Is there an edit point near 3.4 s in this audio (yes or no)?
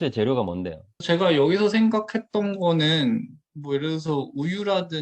no